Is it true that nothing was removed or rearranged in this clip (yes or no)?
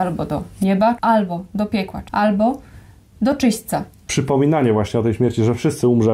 no